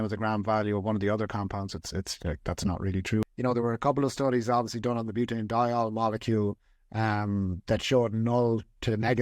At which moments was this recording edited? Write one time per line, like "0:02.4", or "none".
0:03.2